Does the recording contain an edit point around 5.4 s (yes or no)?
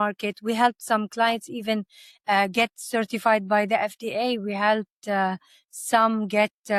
no